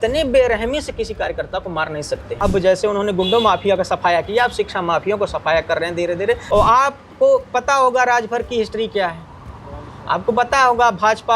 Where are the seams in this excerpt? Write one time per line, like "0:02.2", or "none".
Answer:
0:02.3
0:06.4